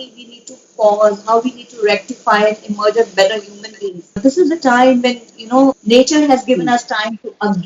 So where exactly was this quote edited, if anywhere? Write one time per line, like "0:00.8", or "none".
none